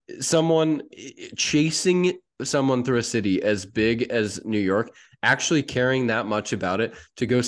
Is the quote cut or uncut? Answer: uncut